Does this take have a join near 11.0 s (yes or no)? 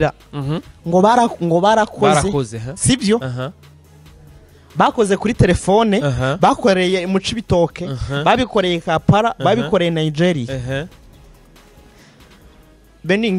no